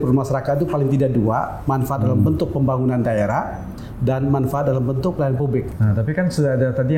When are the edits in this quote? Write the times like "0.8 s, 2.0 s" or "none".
5.7 s